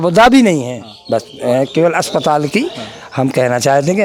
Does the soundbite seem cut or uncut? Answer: uncut